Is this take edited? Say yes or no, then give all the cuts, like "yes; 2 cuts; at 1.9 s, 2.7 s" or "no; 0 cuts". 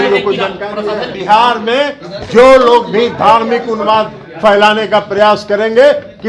yes; 1 cut; at 1.2 s